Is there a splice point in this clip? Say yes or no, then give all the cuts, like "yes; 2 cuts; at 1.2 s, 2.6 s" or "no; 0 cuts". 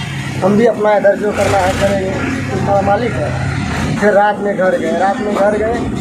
yes; 1 cut; at 3.9 s